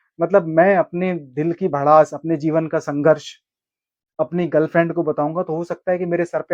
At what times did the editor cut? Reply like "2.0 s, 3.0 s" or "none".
none